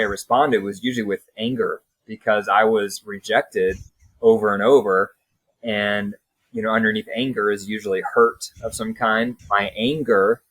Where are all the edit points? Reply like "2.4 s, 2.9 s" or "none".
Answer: 9.4 s